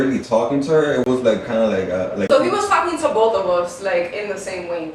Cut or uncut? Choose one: cut